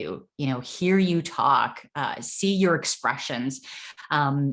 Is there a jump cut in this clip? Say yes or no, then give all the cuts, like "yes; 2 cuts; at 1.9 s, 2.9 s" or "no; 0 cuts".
no; 0 cuts